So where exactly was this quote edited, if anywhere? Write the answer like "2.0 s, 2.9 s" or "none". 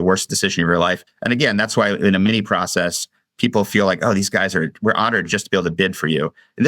1.1 s